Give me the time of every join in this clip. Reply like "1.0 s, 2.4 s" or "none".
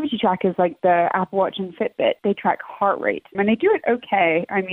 none